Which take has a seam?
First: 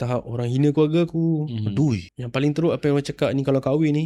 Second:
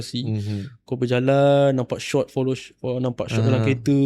first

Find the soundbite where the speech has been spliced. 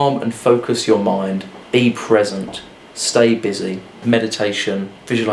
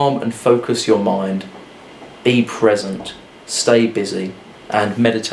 first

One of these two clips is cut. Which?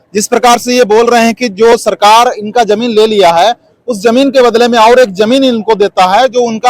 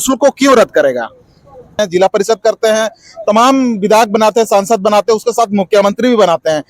second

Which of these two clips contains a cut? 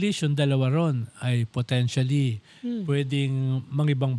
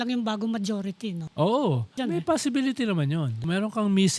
second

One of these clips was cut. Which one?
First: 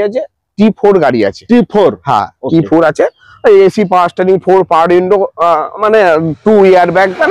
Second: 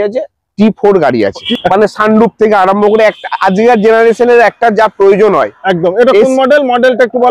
second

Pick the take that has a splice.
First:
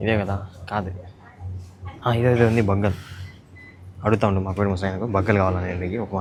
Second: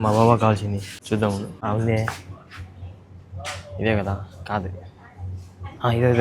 second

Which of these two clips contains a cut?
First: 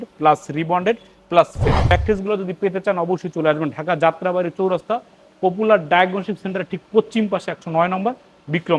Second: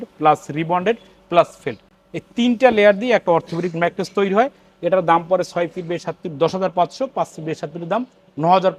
first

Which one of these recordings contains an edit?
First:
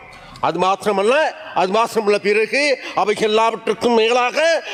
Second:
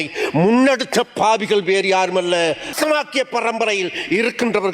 second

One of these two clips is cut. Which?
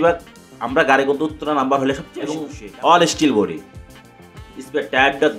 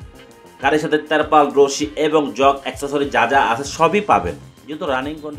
first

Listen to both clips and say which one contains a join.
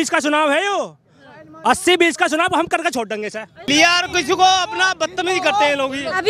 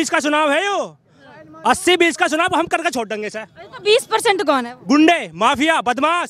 first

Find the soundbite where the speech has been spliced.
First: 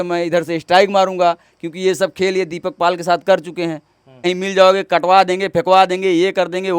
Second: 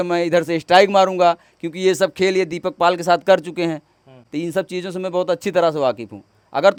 first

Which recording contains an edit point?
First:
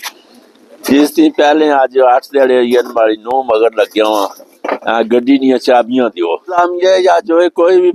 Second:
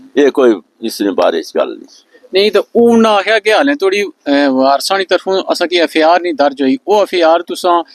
first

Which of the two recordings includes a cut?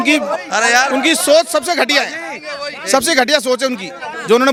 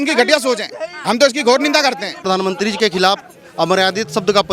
second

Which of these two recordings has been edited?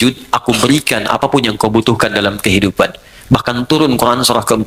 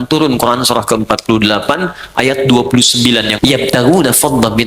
second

